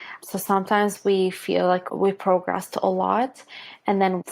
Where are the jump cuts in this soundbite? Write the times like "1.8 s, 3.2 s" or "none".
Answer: 1.8 s